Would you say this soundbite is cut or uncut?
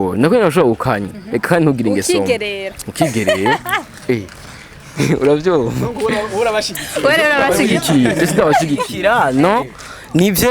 uncut